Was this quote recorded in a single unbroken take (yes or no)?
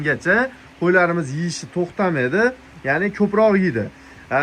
yes